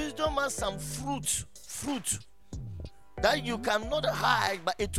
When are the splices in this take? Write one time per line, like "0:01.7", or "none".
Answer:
none